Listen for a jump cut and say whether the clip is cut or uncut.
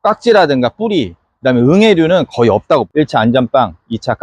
cut